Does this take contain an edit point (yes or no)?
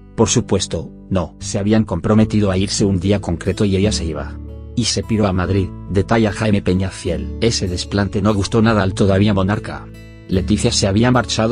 no